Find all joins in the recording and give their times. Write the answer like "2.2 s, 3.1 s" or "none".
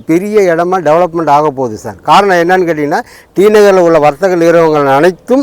none